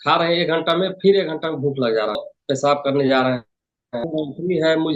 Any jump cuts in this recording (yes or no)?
yes